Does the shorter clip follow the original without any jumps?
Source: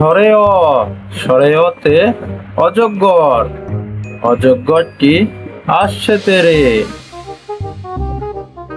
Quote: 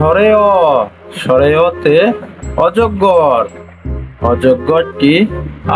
yes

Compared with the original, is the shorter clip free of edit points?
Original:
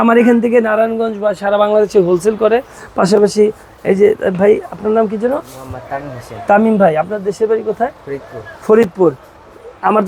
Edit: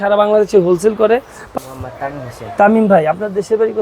no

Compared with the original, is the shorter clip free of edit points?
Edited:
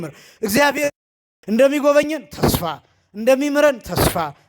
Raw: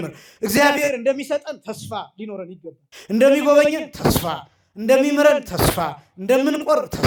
no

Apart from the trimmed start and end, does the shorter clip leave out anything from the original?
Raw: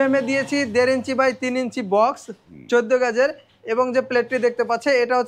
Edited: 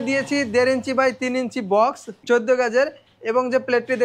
yes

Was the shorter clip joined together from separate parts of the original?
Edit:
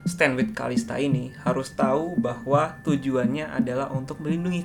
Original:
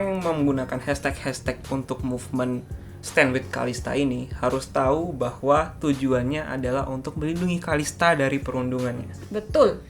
no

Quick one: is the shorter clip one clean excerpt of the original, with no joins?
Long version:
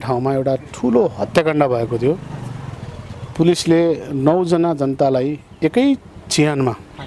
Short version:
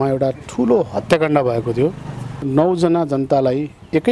no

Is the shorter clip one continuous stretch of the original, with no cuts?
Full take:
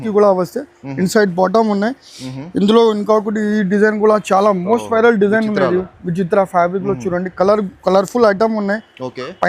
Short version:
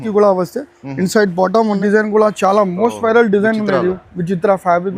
no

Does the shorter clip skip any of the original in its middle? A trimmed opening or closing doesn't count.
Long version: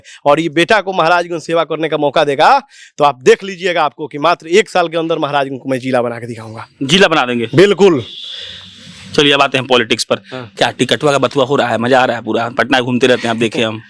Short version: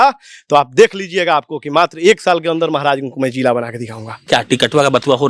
yes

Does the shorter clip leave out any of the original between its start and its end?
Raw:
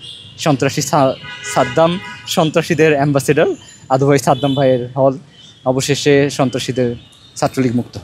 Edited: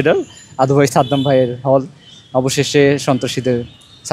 no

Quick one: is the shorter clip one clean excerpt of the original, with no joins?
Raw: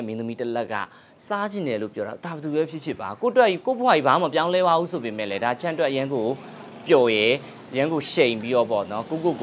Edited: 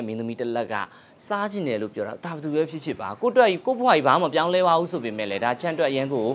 yes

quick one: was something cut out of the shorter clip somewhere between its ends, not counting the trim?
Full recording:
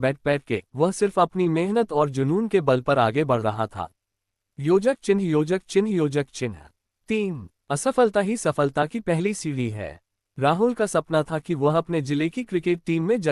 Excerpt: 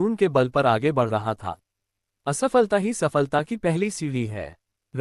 yes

